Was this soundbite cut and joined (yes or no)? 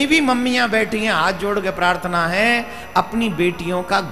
no